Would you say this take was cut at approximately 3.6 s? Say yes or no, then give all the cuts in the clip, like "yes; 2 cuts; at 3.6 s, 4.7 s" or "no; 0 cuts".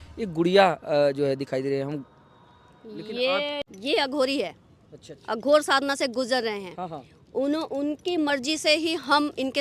yes; 1 cut; at 3.6 s